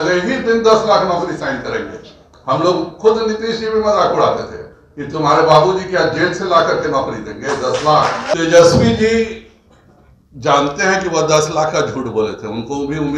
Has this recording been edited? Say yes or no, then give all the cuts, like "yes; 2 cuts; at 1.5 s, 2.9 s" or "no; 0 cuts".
yes; 1 cut; at 8.3 s